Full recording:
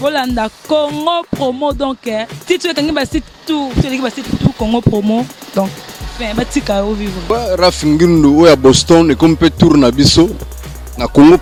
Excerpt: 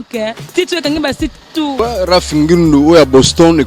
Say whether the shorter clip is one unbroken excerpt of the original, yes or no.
no